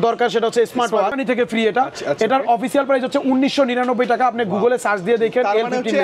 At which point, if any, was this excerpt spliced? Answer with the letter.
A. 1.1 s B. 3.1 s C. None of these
A